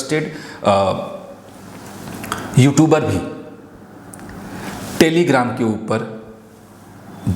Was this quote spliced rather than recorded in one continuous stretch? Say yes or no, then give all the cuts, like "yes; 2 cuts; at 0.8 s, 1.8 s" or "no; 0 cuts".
no; 0 cuts